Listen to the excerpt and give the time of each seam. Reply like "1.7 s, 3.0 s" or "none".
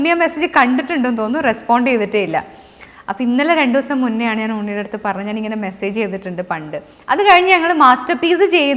none